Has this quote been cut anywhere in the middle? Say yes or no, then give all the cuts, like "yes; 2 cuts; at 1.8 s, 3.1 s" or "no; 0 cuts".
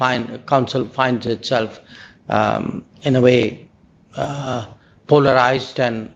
no; 0 cuts